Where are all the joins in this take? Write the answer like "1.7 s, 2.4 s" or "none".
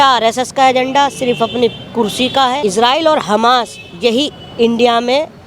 2.6 s